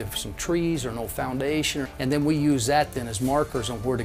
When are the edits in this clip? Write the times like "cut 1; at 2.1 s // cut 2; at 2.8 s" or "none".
cut 1; at 1.9 s